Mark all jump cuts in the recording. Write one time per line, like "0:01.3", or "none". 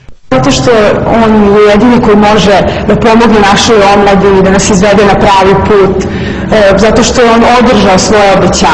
none